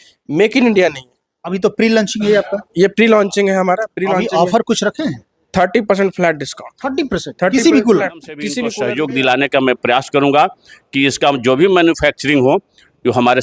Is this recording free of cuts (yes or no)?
no